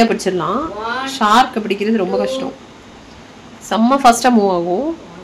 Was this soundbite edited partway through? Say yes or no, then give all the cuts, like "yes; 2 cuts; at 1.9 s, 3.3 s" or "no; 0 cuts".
no; 0 cuts